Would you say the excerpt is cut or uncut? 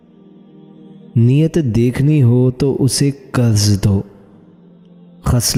uncut